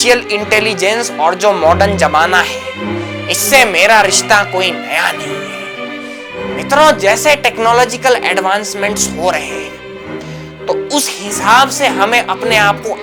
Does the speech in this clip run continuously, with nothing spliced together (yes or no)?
yes